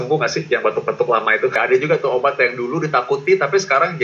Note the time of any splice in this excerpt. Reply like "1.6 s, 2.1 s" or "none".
1.6 s